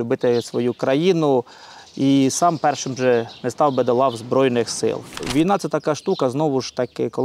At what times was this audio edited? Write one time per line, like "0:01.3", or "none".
0:05.1